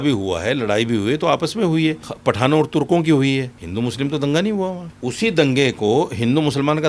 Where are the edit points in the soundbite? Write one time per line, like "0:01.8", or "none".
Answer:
0:02.1
0:03.6
0:04.9